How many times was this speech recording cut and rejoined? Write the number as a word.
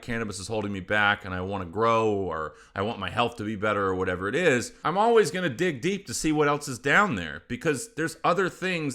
one